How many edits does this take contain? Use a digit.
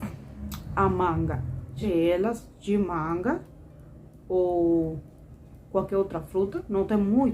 1